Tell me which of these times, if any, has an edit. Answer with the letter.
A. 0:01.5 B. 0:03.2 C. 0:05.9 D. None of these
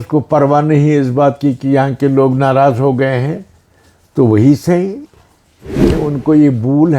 C